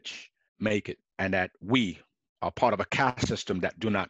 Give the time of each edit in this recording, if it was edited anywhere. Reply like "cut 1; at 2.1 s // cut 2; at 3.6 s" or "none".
cut 1; at 1.0 s